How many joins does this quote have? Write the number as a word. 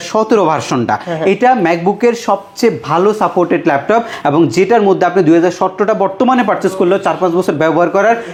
zero